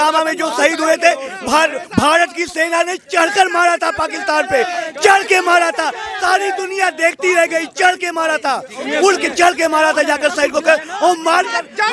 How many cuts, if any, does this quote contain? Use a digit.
0